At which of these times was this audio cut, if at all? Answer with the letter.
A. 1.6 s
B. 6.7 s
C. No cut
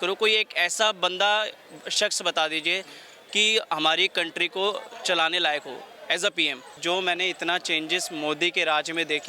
B